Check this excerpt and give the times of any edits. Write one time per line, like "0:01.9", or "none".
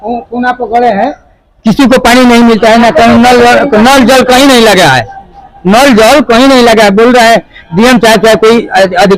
none